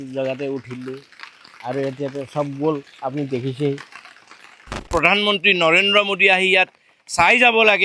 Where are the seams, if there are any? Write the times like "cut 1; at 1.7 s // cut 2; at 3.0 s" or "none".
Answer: cut 1; at 4.9 s